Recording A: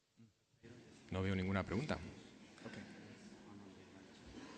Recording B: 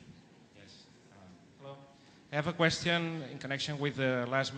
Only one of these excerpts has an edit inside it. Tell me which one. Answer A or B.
A